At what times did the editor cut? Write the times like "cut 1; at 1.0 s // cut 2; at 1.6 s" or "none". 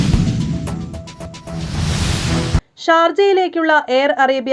cut 1; at 1.4 s